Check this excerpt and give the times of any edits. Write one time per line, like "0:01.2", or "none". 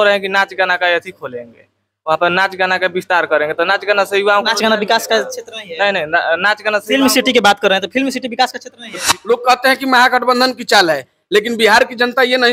0:09.0